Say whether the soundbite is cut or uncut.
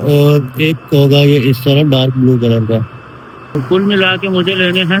uncut